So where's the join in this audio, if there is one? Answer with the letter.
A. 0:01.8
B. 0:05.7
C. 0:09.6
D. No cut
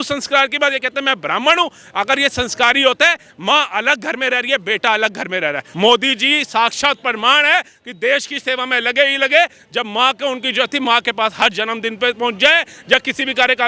B